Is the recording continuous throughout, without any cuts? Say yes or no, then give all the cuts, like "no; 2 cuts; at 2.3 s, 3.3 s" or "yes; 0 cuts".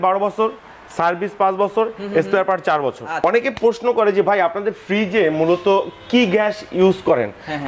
no; 1 cut; at 3.1 s